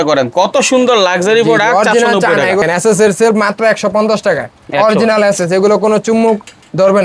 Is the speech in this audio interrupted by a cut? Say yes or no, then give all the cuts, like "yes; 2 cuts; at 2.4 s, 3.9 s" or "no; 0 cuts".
yes; 1 cut; at 2.6 s